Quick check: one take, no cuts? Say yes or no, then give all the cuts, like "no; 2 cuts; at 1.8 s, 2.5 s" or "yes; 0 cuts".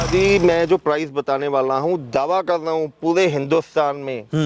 yes; 0 cuts